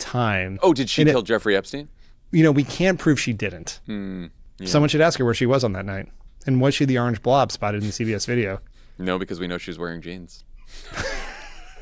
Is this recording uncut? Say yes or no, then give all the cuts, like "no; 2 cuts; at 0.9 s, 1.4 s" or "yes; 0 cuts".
yes; 0 cuts